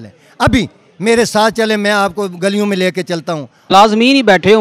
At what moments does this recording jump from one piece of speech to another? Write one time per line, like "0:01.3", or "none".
0:03.7